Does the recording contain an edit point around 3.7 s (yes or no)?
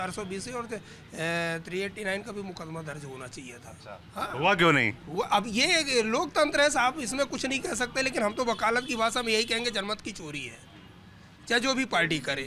no